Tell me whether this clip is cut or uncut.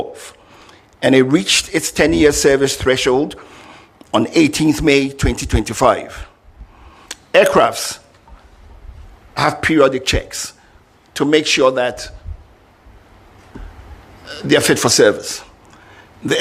uncut